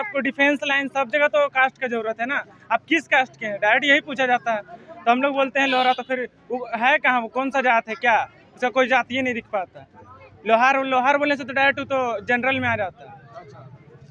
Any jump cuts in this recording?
no; 0 cuts

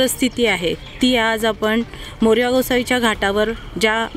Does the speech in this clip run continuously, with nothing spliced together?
yes; 0 cuts

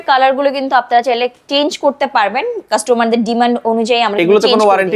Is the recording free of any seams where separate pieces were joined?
yes; 0 cuts

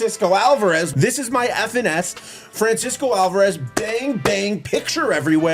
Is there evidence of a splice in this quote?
yes; 1 cut; at 0.9 s

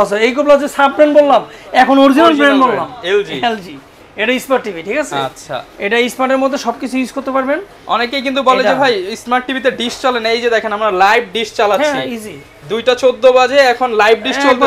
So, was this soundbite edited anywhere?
no; 0 cuts

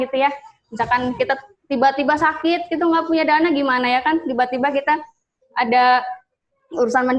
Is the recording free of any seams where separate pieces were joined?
yes; 0 cuts

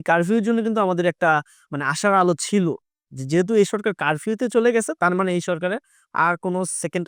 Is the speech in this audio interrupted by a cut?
no; 0 cuts

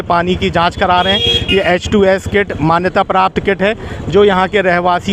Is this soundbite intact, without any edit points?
yes; 0 cuts

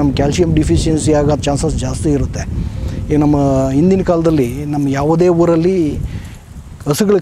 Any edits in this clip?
no; 0 cuts

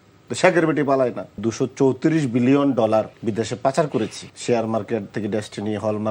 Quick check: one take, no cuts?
no; 3 cuts; at 1.4 s, 3.1 s, 4.3 s

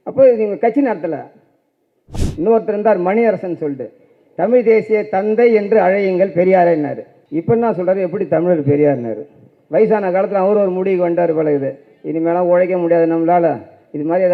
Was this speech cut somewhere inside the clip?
yes; 1 cut; at 2.0 s

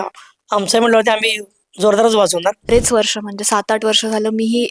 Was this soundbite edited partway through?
yes; 1 cut; at 2.7 s

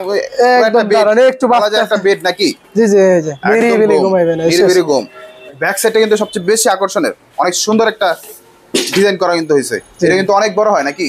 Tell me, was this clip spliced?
yes; 1 cut; at 5.6 s

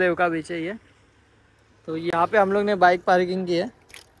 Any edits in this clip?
no; 0 cuts

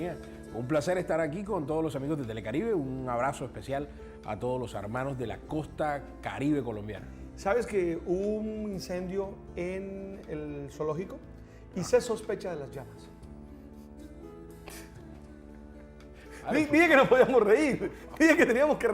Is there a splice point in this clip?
yes; 1 cut; at 11.1 s

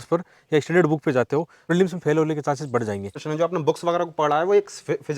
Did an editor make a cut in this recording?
yes; 2 cuts; at 1.6 s, 3.2 s

